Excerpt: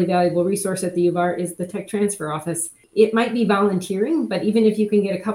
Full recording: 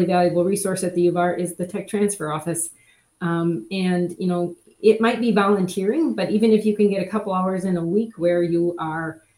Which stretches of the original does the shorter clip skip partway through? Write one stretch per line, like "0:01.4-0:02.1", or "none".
0:02.8-0:04.6